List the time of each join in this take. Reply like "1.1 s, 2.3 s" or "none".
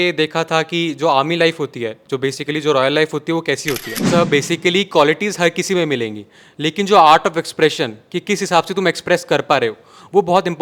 3.9 s